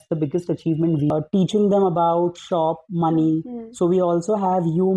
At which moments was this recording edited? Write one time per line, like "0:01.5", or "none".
0:01.1

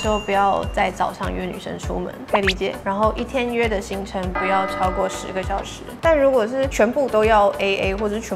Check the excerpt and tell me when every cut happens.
0:02.8
0:05.8

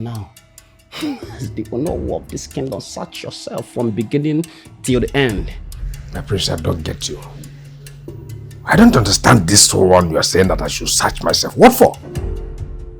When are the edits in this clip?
0:12.0

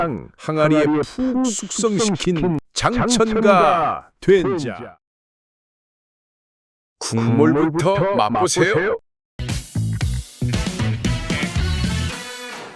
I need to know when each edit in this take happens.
0:09.4

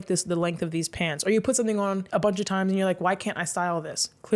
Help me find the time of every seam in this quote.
0:02.0

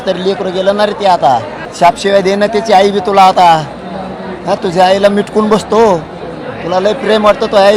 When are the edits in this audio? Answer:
0:01.6

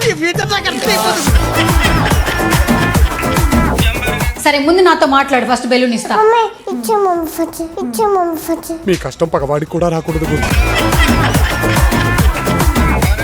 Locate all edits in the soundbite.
0:04.3

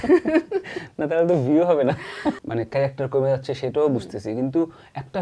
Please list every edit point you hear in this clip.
0:02.4

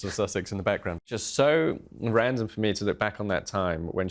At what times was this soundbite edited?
0:01.1

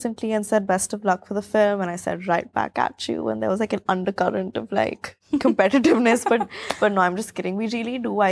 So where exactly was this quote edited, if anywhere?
none

